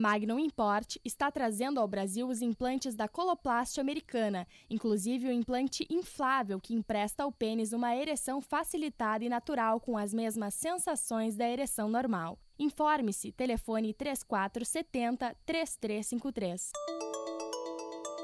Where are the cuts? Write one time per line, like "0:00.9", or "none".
0:16.7